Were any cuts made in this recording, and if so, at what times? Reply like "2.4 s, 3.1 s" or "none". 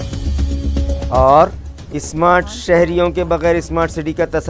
1.1 s